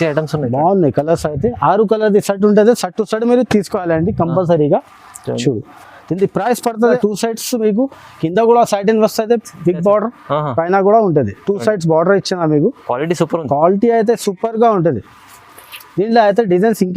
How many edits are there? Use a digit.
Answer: 1